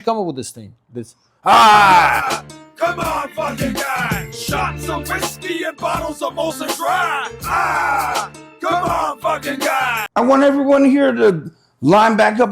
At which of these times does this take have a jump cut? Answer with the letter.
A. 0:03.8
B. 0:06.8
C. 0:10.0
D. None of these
C